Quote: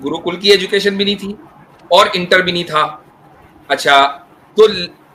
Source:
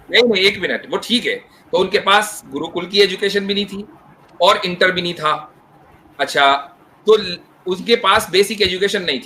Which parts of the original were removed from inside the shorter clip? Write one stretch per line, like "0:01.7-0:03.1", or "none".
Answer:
none